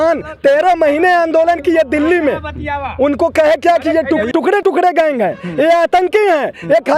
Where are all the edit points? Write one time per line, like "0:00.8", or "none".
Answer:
0:04.6